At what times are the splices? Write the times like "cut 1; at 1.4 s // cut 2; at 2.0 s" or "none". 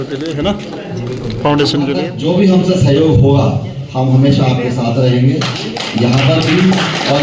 cut 1; at 2.1 s